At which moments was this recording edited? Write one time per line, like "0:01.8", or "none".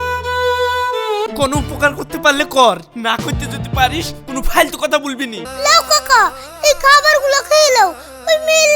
0:01.3
0:05.4